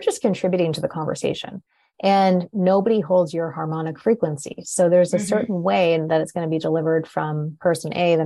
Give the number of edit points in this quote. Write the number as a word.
one